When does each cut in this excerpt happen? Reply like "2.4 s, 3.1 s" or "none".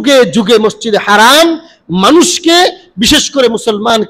none